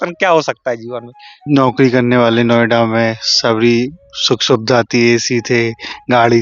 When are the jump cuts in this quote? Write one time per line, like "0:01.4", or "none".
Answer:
0:01.4